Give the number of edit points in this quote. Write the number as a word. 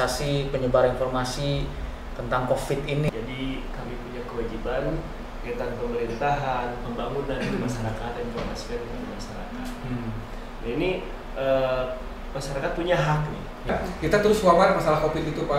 two